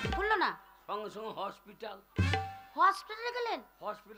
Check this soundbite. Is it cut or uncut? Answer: uncut